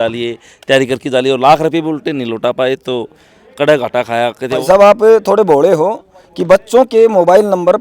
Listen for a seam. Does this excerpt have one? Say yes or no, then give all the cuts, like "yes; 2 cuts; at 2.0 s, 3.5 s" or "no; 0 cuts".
yes; 1 cut; at 4.6 s